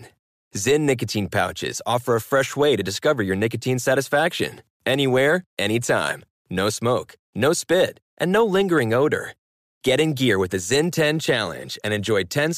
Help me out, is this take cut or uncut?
uncut